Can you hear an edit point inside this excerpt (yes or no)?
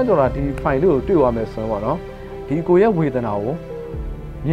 no